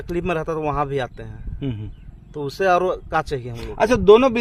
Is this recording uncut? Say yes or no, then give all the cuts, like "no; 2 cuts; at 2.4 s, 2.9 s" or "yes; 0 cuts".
yes; 0 cuts